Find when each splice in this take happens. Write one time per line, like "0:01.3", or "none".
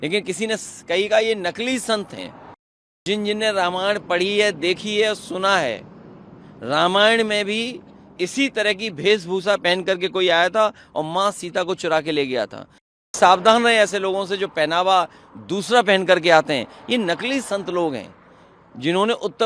0:03.0
0:13.1